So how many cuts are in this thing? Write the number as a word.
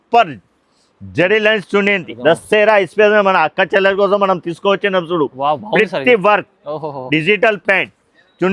one